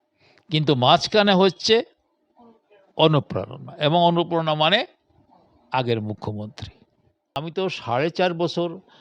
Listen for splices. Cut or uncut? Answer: cut